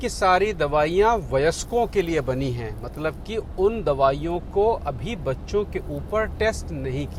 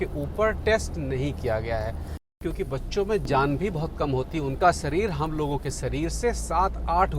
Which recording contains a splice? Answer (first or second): second